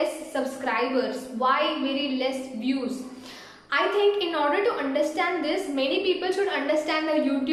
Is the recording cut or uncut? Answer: uncut